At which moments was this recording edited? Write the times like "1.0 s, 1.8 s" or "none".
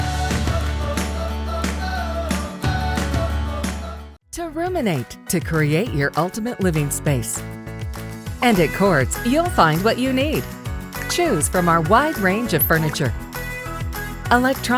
4.0 s